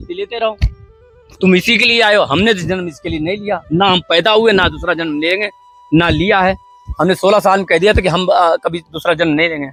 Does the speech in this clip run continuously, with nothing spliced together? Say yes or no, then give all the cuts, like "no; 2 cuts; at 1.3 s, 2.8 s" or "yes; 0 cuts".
yes; 0 cuts